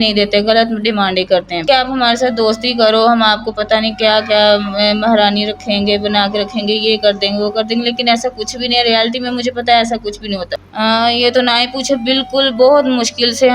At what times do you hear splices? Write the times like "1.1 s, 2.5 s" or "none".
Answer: 1.6 s, 10.5 s